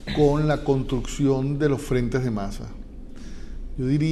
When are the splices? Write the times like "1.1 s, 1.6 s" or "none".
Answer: 1.4 s